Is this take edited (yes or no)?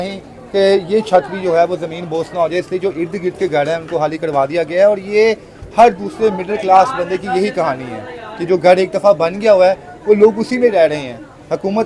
no